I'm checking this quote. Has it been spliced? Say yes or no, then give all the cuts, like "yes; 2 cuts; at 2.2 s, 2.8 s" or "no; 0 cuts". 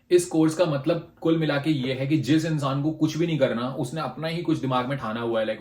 no; 0 cuts